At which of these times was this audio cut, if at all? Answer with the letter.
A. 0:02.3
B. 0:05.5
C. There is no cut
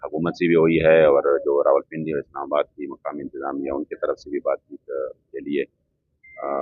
C